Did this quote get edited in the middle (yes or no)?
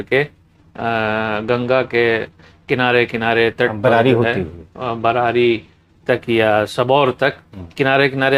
no